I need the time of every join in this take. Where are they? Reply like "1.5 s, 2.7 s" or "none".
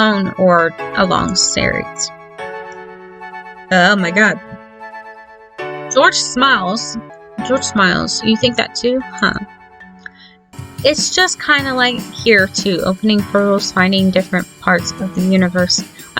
7.1 s, 10.6 s